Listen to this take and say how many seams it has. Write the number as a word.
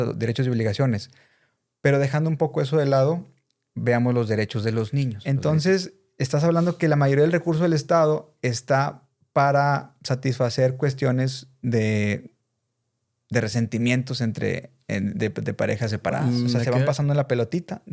two